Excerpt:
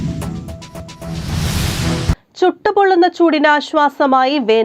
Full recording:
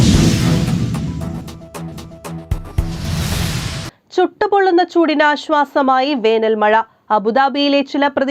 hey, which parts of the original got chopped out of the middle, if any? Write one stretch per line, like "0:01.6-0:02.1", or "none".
0:02.0-0:02.7